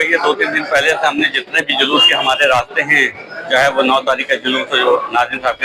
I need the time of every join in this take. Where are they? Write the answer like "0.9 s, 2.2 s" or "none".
none